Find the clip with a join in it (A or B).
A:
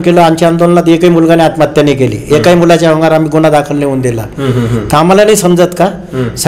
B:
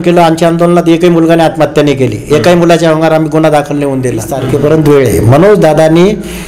B